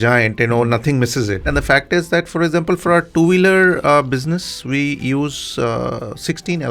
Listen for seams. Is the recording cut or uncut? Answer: cut